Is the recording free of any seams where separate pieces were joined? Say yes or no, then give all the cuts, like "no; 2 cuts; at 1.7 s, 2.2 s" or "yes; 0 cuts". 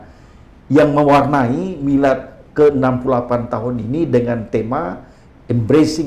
yes; 0 cuts